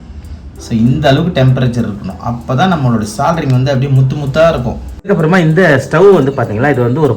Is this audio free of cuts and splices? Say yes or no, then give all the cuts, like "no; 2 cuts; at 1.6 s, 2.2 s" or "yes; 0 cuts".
no; 1 cut; at 5.1 s